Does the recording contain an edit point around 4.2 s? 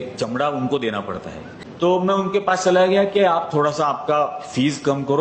no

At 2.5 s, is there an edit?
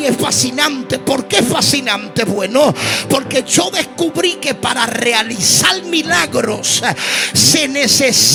no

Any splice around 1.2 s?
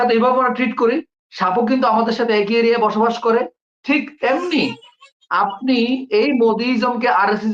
no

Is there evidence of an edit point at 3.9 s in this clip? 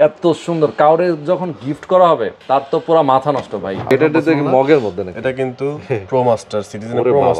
yes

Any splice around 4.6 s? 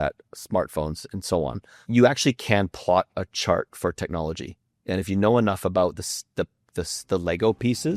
no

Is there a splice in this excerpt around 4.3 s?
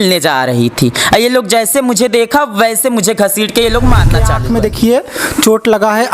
yes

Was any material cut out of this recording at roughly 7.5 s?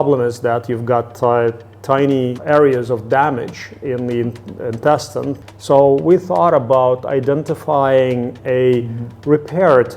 no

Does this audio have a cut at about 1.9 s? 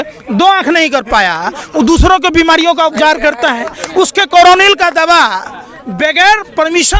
no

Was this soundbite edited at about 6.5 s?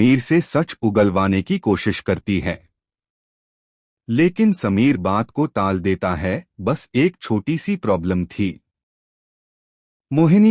yes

